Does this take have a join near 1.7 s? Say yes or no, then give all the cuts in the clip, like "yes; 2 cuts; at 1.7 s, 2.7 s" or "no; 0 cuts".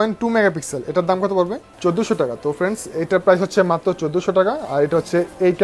yes; 1 cut; at 1.7 s